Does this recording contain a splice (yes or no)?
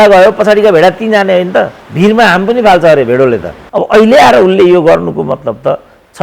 yes